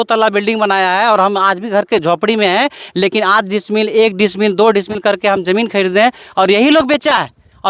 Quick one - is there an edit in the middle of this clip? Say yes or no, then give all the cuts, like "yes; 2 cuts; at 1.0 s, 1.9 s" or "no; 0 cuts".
no; 0 cuts